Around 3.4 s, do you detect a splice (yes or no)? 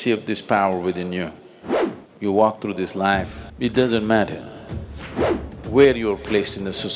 yes